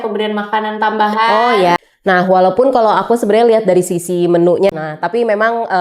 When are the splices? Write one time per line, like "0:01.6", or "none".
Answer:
0:01.8
0:04.7